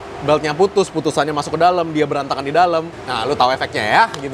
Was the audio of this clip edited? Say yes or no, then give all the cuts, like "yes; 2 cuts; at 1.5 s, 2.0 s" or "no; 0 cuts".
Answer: yes; 1 cut; at 3.0 s